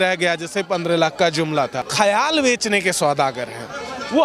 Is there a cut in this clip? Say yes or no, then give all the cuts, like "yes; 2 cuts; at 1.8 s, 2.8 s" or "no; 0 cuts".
yes; 1 cut; at 1.9 s